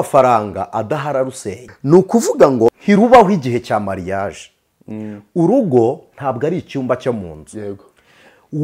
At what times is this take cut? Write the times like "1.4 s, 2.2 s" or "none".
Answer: 1.7 s, 2.8 s